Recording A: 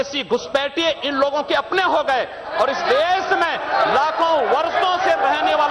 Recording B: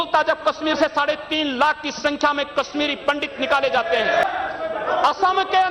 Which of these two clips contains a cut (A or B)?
B